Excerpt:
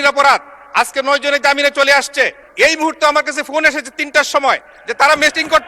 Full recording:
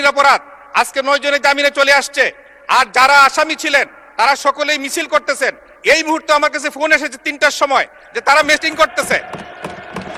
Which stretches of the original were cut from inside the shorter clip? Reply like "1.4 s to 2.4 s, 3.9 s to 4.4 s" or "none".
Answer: 2.4 s to 5.7 s